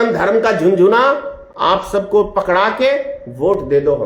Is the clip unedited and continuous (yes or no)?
yes